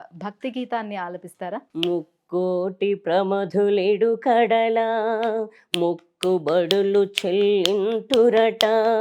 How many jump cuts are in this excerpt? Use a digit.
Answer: 1